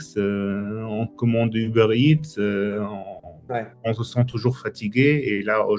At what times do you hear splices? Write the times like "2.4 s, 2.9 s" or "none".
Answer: 3.7 s